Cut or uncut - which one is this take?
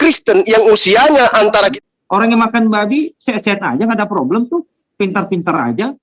cut